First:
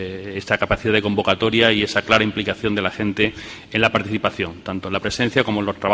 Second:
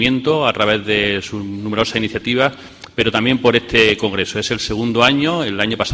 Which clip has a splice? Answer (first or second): second